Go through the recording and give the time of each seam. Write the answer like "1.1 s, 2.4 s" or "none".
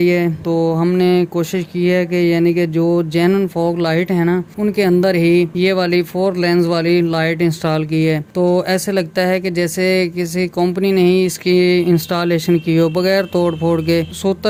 none